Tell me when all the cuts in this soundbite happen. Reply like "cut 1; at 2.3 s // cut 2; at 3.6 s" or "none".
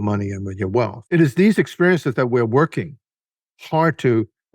cut 1; at 1.0 s